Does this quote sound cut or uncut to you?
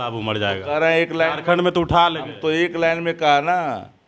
uncut